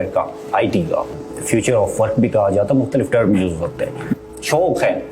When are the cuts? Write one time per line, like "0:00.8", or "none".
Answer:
0:01.2
0:04.3